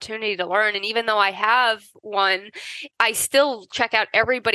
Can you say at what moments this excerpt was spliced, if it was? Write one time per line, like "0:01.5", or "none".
0:02.8